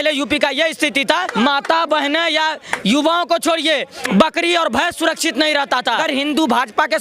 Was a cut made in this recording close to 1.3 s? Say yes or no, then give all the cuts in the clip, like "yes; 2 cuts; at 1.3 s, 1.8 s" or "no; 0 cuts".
yes; 2 cuts; at 1.3 s, 6.0 s